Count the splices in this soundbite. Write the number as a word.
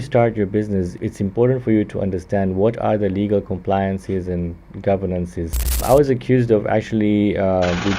two